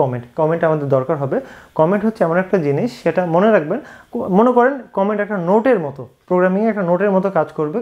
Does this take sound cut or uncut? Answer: uncut